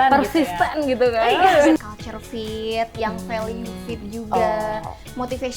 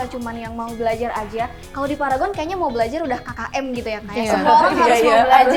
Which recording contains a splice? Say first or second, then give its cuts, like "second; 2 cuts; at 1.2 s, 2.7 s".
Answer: first; 1 cut; at 1.8 s